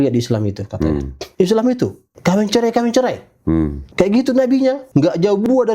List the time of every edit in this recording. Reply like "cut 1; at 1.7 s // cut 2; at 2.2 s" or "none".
cut 1; at 1.2 s // cut 2; at 2.1 s // cut 3; at 3.8 s // cut 4; at 4.8 s